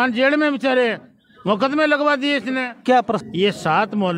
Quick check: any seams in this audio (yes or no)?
yes